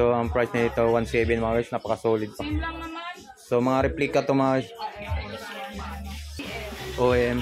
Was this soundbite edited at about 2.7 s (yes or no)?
no